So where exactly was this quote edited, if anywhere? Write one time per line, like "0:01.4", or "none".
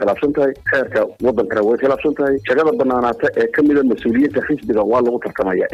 none

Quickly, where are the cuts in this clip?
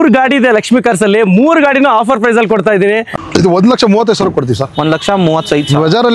0:03.1

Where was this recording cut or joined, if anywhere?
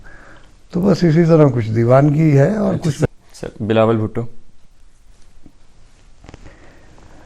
0:03.1

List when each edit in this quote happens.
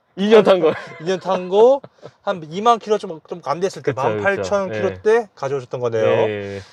none

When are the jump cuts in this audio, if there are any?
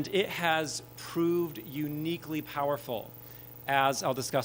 none

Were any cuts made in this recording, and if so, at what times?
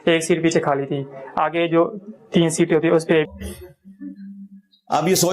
0:03.3

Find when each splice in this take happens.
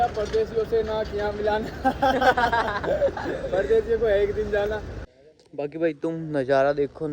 0:04.8

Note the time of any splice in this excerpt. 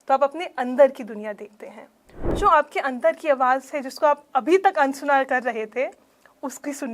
0:02.4

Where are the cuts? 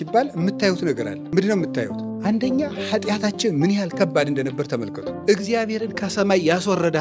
0:01.1
0:02.0
0:05.2

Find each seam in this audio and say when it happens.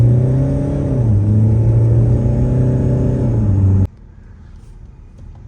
0:03.9

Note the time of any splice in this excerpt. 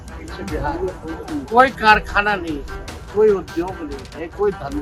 none

